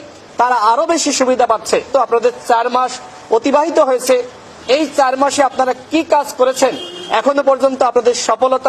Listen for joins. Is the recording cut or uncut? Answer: cut